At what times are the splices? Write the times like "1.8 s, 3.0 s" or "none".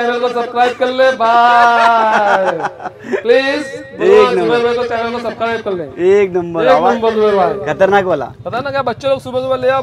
none

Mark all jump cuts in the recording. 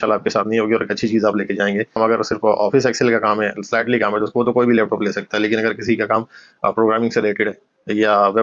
1.9 s

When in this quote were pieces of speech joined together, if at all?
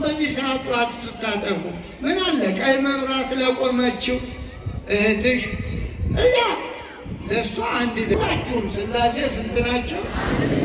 8.1 s

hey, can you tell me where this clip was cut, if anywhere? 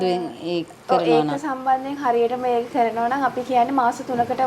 none

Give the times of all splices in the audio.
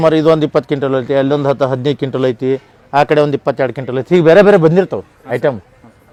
none

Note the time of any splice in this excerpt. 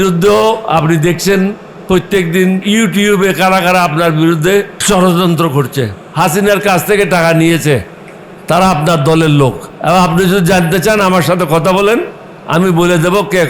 2.6 s, 4.8 s, 6.0 s, 9.7 s

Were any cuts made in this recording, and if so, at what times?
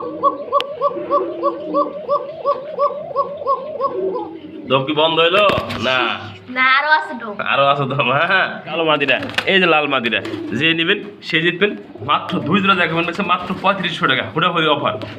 8.7 s

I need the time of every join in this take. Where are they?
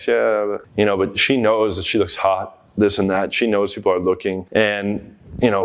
4.4 s

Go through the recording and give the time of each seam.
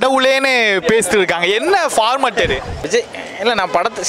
2.8 s

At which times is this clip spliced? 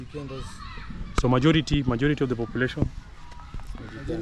none

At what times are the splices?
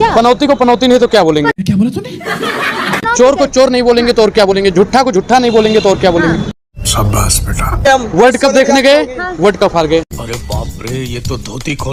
none

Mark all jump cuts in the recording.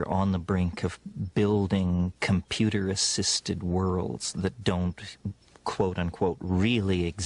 3.3 s

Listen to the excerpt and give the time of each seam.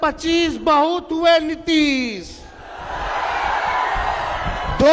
none

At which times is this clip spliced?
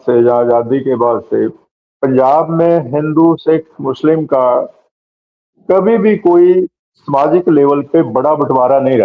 none

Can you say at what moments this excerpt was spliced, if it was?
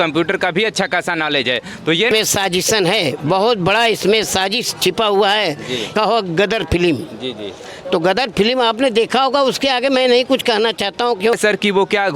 2.1 s, 5.9 s, 11.4 s

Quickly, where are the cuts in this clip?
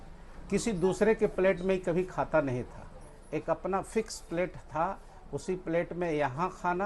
none

